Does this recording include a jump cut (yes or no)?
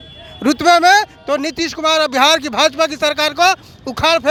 no